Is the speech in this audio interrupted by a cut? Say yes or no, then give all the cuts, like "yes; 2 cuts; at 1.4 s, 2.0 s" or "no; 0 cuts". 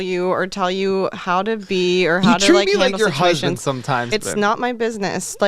yes; 1 cut; at 4.1 s